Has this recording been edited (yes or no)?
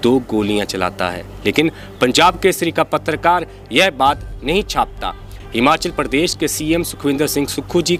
no